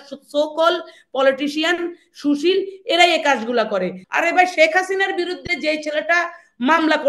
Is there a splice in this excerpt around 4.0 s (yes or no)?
yes